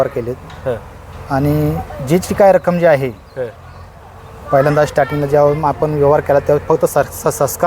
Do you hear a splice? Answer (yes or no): no